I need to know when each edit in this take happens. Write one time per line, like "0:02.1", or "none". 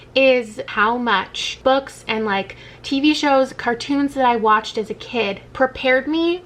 0:01.1
0:05.5